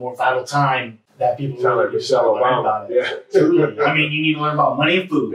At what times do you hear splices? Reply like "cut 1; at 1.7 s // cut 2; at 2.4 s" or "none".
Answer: cut 1; at 1.0 s